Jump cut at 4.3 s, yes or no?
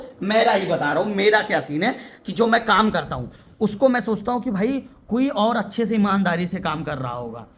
no